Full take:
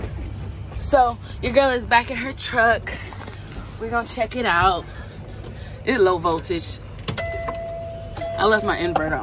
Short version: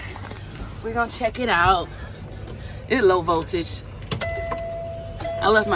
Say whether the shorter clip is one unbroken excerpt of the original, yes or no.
yes